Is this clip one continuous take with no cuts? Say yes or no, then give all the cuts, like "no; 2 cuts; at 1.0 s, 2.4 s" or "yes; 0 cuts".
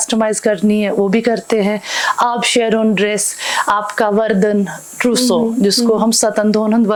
yes; 0 cuts